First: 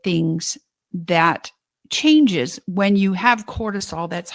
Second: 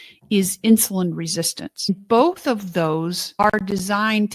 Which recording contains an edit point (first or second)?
second